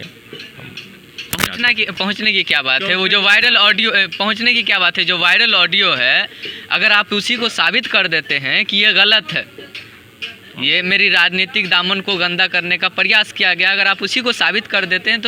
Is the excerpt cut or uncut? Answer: uncut